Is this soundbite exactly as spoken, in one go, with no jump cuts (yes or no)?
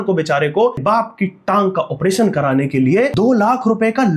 no